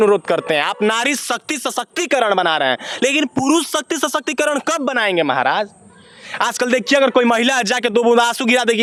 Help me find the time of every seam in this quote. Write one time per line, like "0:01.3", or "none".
none